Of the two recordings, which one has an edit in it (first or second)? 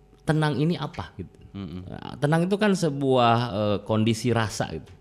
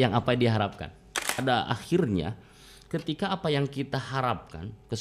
second